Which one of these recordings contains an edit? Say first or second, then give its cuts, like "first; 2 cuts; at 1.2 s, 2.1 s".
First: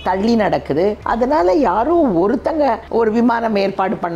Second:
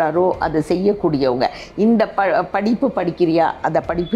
first; 2 cuts; at 1.0 s, 2.8 s